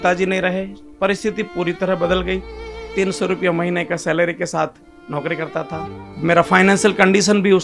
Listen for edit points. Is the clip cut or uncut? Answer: cut